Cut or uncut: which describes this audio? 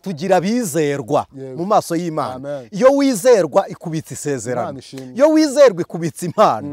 uncut